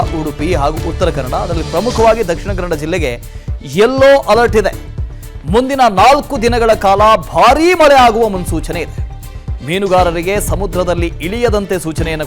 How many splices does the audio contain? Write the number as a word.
one